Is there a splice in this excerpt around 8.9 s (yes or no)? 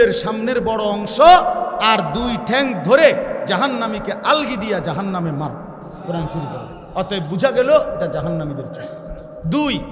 no